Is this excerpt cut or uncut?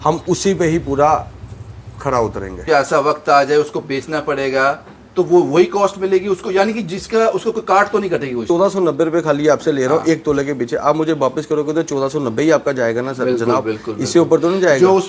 cut